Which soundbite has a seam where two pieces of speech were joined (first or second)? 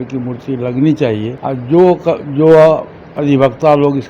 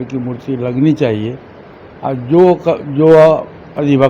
first